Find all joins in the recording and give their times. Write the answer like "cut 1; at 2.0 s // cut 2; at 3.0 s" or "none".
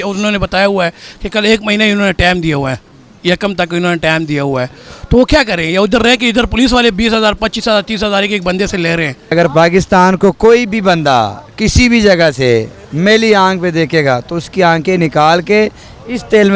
cut 1; at 9.3 s